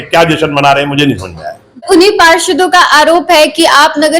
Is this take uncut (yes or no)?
no